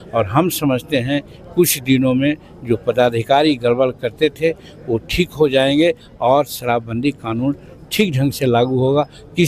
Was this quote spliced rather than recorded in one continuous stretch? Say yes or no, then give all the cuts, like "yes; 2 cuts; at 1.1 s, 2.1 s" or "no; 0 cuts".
no; 0 cuts